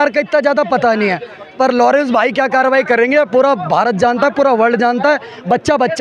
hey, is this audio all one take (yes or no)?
yes